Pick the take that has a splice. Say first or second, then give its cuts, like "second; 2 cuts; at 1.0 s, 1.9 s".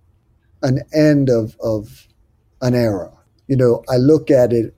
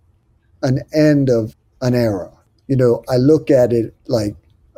second; 1 cut; at 1.5 s